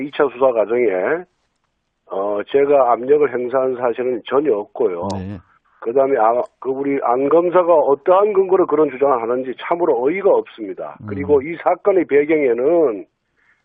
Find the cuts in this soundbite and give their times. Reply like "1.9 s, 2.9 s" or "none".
none